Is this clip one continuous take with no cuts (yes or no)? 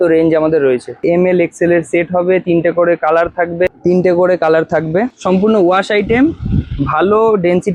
no